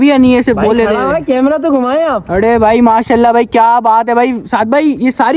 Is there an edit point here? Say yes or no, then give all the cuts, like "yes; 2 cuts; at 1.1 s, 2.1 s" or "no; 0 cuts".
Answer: no; 0 cuts